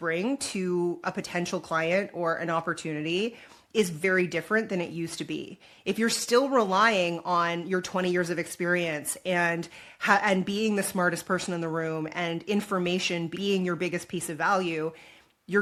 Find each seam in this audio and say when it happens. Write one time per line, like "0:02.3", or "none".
none